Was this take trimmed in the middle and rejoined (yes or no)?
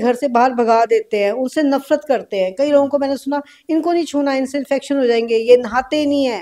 no